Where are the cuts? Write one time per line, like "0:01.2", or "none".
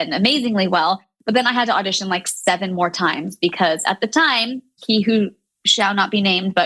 none